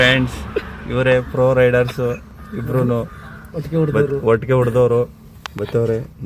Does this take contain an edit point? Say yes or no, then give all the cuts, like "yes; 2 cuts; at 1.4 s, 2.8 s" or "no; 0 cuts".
no; 0 cuts